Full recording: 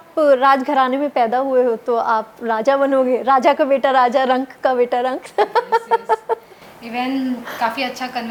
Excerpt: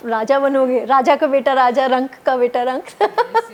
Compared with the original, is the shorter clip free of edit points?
yes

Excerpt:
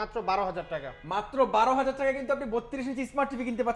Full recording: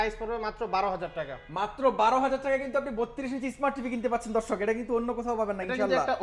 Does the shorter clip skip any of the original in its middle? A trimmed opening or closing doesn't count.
no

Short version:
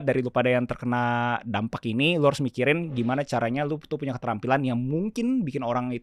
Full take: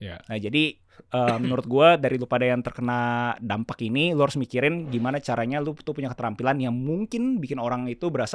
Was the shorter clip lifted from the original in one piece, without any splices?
yes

